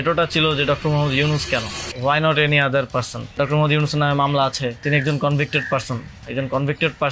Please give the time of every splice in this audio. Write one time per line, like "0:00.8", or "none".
0:01.8
0:03.3
0:04.8